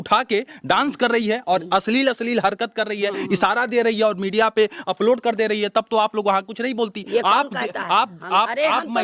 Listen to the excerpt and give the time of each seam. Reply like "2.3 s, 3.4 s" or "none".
none